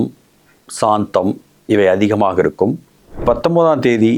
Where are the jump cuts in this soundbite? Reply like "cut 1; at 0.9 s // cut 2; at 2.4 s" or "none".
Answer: cut 1; at 3.2 s